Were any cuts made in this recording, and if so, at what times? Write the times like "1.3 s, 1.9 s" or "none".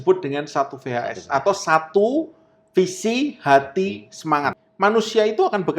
4.6 s

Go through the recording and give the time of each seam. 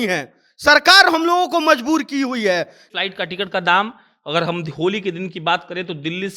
2.8 s

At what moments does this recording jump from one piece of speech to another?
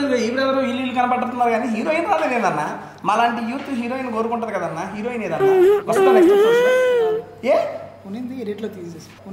none

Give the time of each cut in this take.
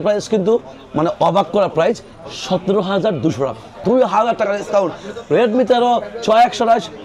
3.8 s

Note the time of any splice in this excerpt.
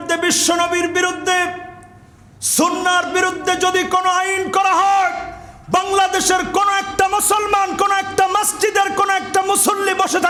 none

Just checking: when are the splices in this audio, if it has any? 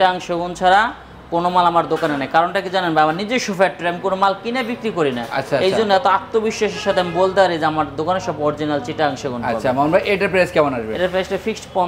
none

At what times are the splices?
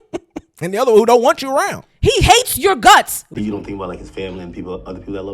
3.2 s

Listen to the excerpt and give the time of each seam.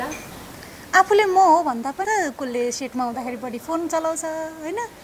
2.0 s

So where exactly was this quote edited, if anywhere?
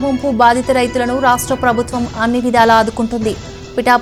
none

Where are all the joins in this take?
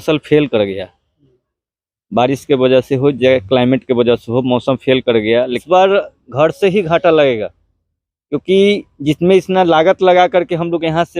5.6 s

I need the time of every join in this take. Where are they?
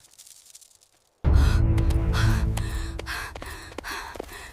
1.1 s

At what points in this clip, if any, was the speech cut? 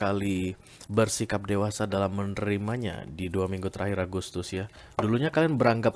4.8 s

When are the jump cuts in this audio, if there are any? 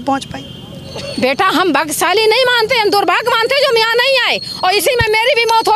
none

